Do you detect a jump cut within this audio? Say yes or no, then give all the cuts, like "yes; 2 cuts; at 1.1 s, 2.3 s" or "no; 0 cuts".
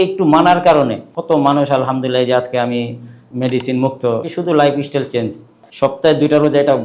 yes; 2 cuts; at 4.3 s, 5.6 s